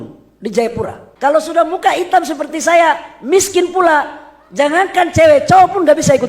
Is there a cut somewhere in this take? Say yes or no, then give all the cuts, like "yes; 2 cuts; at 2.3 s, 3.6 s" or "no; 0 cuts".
yes; 1 cut; at 1.0 s